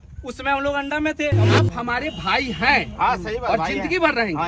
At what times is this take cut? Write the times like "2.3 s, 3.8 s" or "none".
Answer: 1.4 s